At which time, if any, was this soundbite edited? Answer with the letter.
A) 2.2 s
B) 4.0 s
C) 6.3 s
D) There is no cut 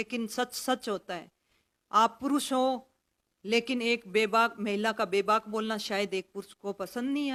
D